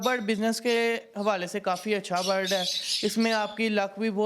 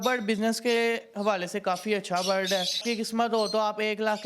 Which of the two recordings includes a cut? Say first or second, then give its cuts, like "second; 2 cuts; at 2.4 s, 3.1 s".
second; 1 cut; at 2.8 s